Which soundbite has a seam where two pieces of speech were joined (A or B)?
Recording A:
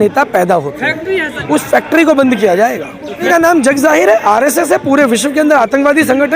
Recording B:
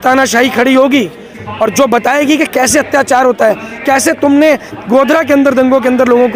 A